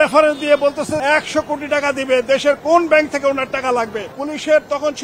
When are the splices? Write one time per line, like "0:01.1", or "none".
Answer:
0:01.0
0:04.1